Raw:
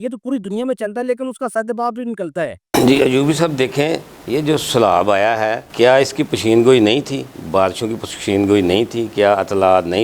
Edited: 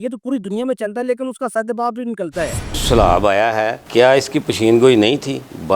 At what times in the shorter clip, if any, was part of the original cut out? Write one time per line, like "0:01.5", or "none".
0:02.7

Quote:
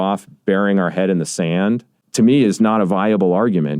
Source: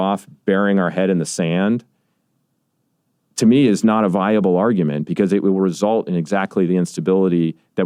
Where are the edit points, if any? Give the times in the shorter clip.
0:02.0

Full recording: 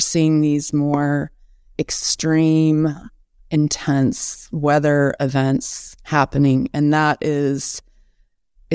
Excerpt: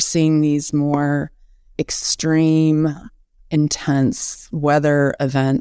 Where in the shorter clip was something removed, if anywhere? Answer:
none

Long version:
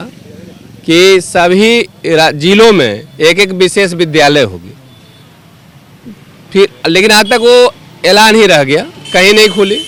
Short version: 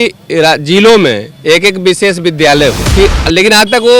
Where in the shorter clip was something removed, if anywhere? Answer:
0:02.8

